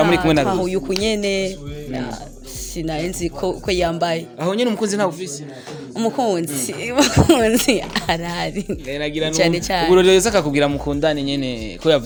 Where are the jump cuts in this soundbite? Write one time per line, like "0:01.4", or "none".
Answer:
none